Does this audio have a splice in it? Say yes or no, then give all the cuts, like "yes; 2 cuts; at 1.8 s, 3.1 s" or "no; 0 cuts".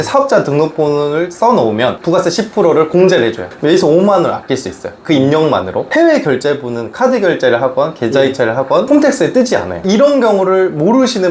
yes; 4 cuts; at 2.0 s, 3.5 s, 5.9 s, 9.8 s